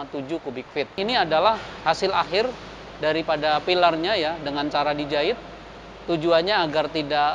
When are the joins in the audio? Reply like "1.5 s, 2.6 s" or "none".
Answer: 1.0 s